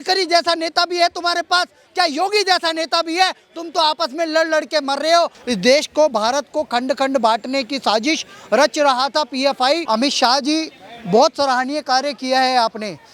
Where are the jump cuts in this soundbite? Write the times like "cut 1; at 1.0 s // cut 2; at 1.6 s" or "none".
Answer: cut 1; at 5.4 s // cut 2; at 9.8 s